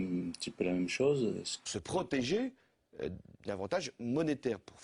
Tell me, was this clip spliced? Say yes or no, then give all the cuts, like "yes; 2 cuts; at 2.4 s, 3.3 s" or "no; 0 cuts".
no; 0 cuts